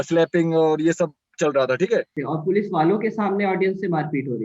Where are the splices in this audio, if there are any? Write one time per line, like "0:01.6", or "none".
0:02.2